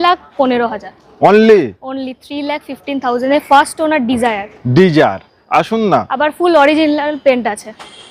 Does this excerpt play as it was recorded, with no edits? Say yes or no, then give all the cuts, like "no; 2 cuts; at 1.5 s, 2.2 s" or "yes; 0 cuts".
yes; 0 cuts